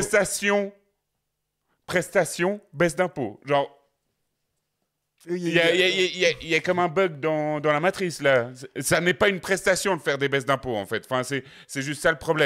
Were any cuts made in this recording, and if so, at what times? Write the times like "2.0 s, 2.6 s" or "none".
none